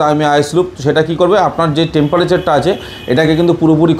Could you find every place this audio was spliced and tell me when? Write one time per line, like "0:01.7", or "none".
none